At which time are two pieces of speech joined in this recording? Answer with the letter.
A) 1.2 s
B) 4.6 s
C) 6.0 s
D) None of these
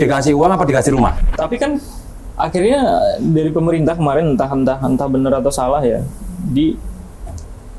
A